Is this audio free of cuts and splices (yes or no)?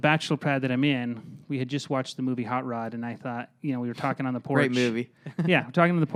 yes